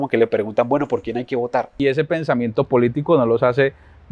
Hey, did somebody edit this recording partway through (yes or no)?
yes